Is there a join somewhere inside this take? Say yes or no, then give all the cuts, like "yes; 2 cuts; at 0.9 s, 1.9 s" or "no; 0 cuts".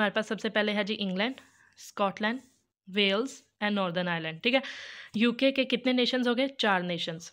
no; 0 cuts